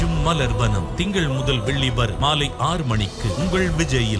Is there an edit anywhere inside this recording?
no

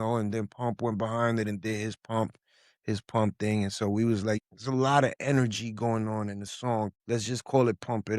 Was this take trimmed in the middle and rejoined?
yes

